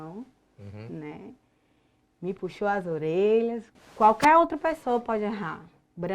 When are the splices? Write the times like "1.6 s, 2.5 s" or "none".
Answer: 3.7 s